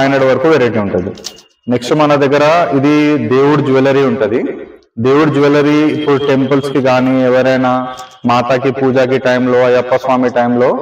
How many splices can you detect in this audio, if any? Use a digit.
0